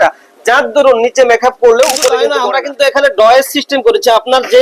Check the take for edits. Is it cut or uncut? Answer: cut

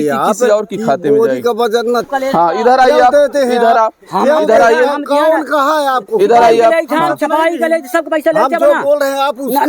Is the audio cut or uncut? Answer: cut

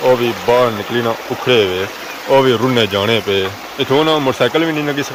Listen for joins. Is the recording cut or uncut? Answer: uncut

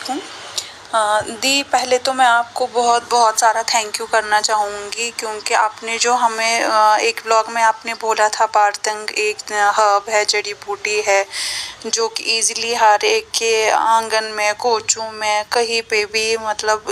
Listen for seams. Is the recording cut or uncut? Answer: uncut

